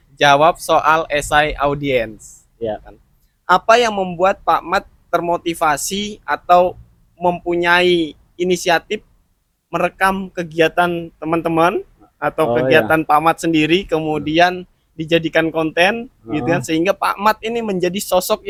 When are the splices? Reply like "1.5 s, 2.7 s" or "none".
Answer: none